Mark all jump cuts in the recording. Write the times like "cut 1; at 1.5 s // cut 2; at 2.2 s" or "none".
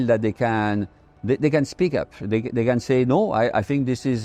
none

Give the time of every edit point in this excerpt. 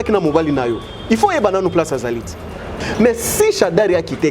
cut 1; at 2.8 s

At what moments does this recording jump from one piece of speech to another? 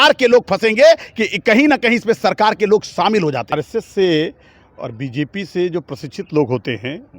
cut 1; at 3.4 s

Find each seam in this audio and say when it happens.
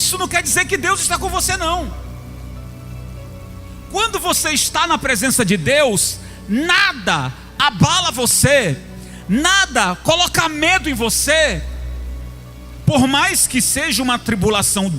none

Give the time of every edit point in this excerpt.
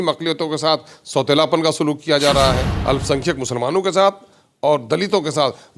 cut 1; at 2.7 s

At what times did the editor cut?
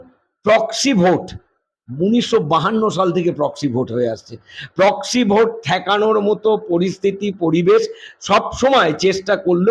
none

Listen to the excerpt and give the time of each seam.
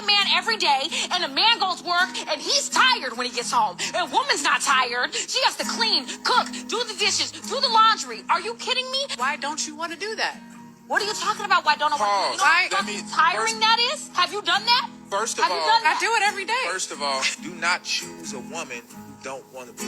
cut 1; at 16.4 s // cut 2; at 17.7 s

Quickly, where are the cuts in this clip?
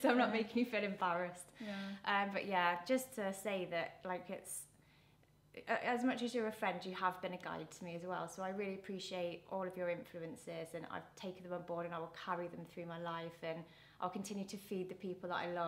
none

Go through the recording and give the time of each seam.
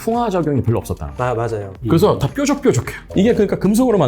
cut 1; at 3.0 s

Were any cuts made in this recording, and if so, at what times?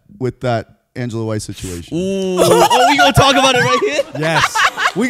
none

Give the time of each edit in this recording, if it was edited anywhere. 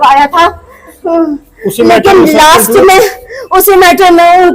none

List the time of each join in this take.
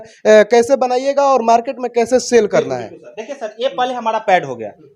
none

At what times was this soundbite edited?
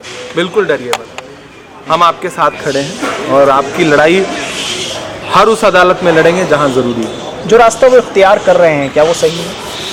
none

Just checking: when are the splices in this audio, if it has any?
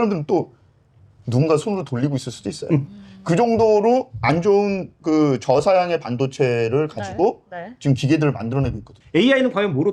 cut 1; at 8.9 s

